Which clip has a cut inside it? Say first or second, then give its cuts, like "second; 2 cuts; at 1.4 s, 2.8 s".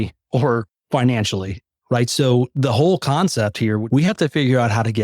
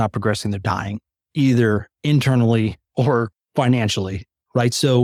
first; 1 cut; at 3.8 s